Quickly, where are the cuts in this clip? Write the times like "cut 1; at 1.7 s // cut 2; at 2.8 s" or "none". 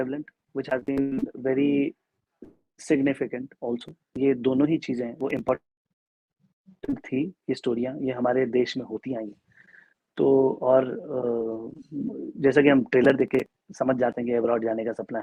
none